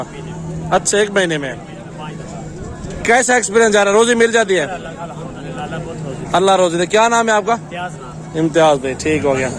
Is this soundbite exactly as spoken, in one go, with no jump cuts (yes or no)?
yes